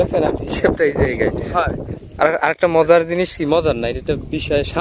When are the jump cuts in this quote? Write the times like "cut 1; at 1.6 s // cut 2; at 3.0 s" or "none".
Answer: cut 1; at 2.0 s